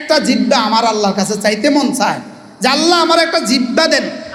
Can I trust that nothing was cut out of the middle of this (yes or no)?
yes